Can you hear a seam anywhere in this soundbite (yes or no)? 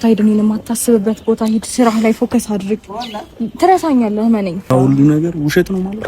yes